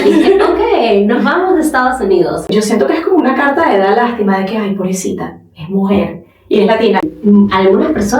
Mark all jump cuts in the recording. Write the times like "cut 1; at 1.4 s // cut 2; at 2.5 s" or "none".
cut 1; at 2.5 s // cut 2; at 7.1 s